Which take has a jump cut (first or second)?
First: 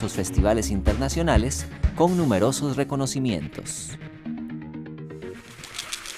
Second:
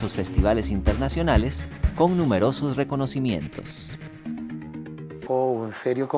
first